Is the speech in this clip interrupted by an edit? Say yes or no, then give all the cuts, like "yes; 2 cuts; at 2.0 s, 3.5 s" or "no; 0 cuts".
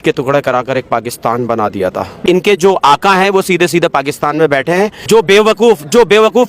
yes; 2 cuts; at 2.2 s, 5.0 s